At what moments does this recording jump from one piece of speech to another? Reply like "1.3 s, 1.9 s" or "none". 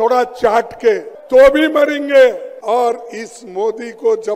1.1 s, 2.5 s